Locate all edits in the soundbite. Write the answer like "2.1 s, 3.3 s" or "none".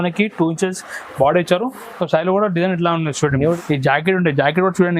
3.5 s